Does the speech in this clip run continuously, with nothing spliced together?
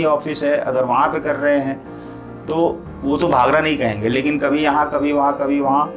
yes; 0 cuts

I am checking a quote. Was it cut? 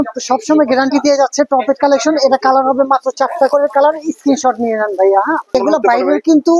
yes; 1 cut; at 5.5 s

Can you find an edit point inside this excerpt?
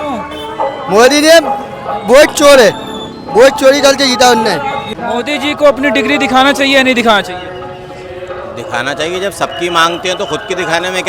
yes; 1 cut; at 4.9 s

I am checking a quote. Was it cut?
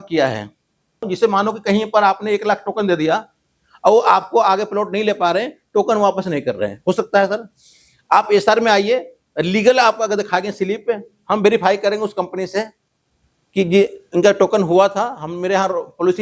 yes; 1 cut; at 1.1 s

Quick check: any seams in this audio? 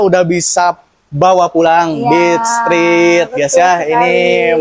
no; 0 cuts

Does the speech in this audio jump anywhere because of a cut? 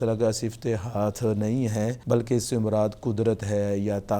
yes; 1 cut; at 2.0 s

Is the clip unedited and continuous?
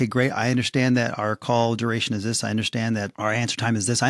no; 1 cut; at 3.1 s

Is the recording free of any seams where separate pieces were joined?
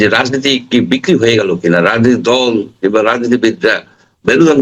yes; 0 cuts

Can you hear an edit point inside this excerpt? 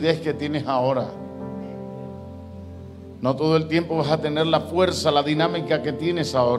no; 0 cuts

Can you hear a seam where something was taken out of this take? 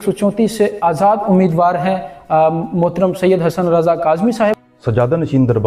yes; 1 cut; at 4.7 s

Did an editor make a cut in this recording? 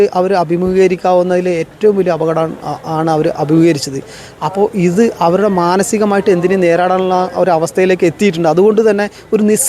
no; 0 cuts

